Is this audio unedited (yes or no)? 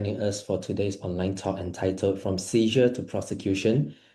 yes